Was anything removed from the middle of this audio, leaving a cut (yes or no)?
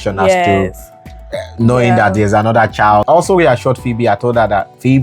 yes